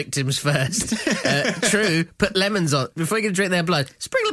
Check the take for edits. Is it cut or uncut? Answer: uncut